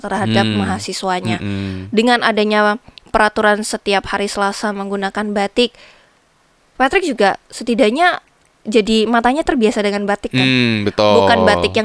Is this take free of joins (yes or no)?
yes